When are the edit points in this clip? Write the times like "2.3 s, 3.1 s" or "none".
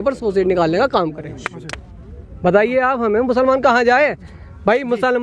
none